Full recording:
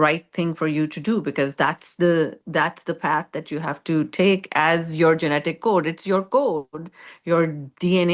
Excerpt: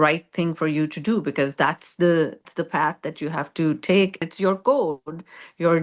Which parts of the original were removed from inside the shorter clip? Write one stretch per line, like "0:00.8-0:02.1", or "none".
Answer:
0:02.4-0:02.8
0:04.5-0:05.9